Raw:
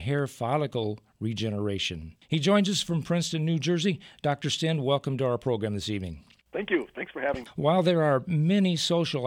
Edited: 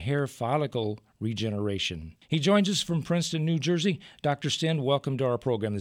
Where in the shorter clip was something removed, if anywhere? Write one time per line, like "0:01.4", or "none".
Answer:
none

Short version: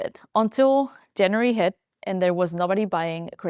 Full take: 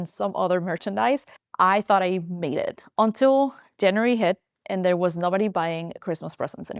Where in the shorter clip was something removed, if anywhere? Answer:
none

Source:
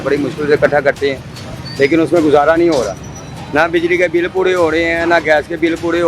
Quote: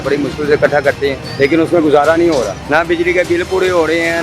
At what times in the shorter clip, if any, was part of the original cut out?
0:01.2
0:02.6

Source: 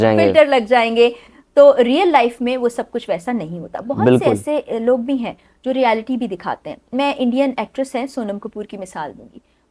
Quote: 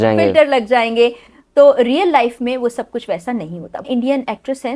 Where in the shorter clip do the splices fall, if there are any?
0:03.8

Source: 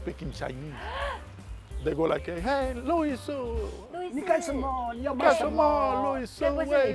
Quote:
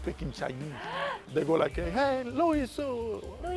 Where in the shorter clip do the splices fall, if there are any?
0:01.2

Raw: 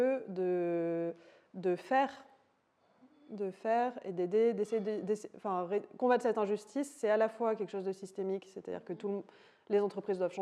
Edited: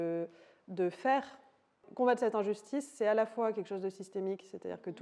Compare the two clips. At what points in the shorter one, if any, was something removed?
0:01.9

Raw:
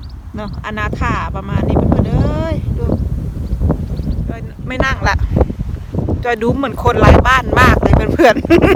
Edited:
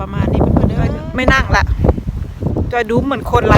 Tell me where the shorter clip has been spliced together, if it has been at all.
0:01.0

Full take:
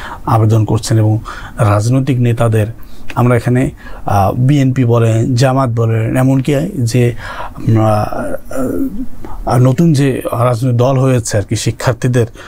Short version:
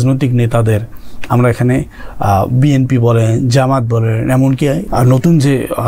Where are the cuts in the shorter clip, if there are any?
0:04.8

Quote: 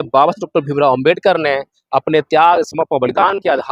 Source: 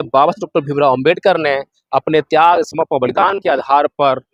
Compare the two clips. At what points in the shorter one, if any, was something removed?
none

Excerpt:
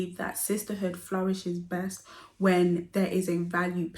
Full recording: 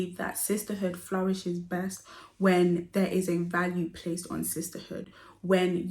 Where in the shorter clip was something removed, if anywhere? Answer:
none

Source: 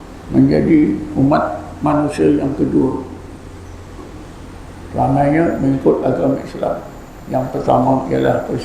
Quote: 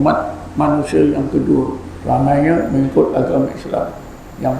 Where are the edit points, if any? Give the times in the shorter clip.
0:01.9

